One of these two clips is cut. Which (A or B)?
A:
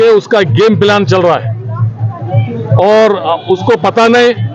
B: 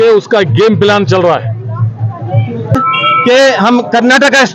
B